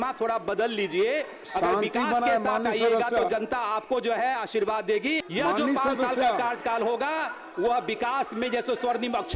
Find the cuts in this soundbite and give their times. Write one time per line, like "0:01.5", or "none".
0:05.2